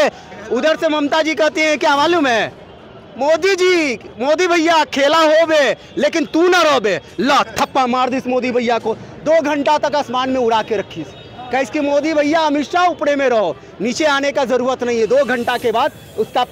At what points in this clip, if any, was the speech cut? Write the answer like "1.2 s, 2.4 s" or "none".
none